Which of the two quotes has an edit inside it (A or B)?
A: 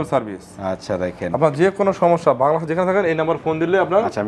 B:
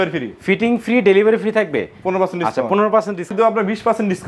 B